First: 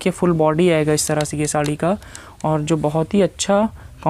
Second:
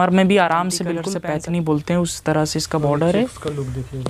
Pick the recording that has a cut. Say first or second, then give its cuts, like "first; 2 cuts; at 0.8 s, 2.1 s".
second; 1 cut; at 1.1 s